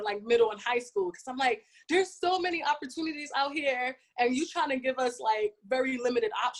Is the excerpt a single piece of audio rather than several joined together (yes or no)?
yes